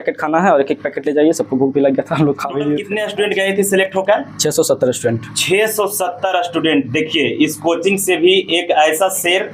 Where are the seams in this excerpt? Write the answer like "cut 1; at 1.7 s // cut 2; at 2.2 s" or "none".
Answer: cut 1; at 3.0 s